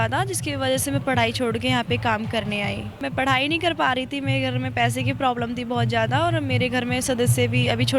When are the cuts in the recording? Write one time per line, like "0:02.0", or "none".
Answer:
0:02.9